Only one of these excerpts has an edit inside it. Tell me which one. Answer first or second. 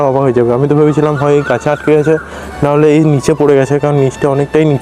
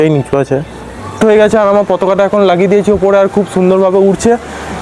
second